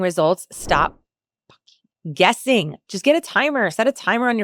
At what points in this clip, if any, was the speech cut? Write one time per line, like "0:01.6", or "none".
none